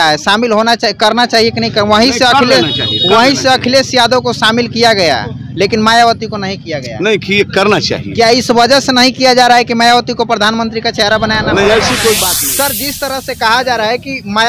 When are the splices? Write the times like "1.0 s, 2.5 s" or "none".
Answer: 12.4 s